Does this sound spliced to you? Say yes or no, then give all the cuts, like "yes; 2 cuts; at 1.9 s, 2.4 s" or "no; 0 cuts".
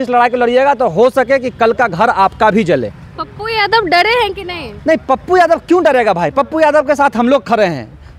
no; 0 cuts